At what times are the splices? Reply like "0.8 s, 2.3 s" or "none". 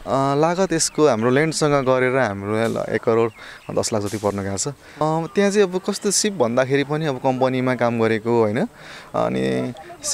5.0 s